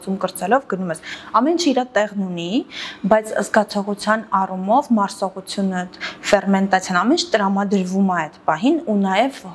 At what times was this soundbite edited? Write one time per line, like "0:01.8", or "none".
none